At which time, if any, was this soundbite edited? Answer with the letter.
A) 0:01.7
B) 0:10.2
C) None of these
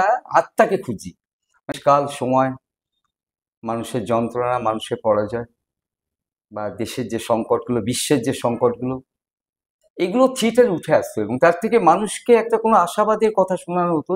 A